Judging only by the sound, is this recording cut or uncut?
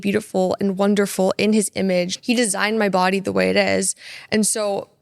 cut